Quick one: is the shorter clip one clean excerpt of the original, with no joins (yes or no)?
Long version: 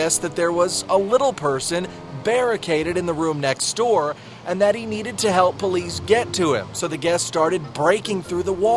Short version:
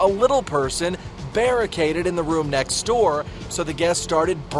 no